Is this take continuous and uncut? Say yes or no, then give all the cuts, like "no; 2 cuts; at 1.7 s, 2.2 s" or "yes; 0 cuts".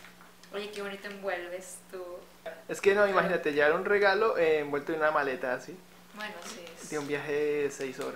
no; 1 cut; at 2.5 s